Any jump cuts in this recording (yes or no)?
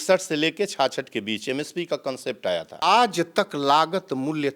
yes